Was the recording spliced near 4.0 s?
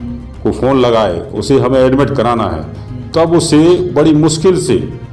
no; 1 cut; at 1.2 s

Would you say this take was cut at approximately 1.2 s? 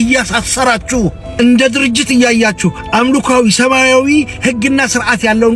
yes; 1 cut; at 1.2 s

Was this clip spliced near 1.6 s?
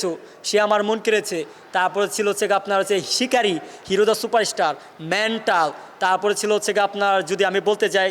no; 0 cuts

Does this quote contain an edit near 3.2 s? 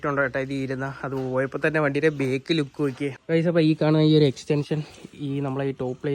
yes; 1 cut; at 3.2 s

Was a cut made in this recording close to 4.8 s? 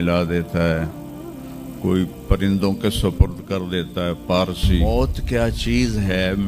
yes; 1 cut; at 4.8 s

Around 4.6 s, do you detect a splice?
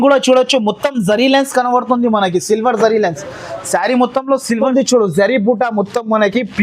yes; 1 cut; at 4.6 s

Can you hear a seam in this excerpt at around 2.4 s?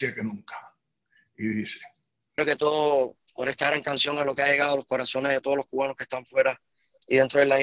yes; 1 cut; at 2.4 s

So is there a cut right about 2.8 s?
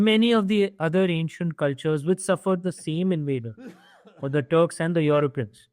no; 0 cuts

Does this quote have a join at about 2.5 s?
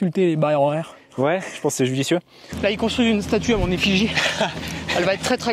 yes; 1 cut; at 2.5 s

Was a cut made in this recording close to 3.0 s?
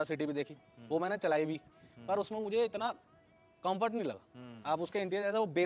no; 0 cuts

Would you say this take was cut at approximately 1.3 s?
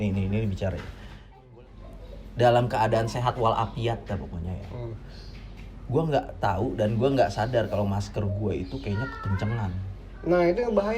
yes; 1 cut; at 1.3 s

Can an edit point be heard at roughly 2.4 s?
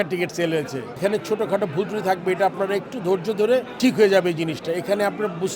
no; 2 cuts; at 1.0 s, 3.7 s

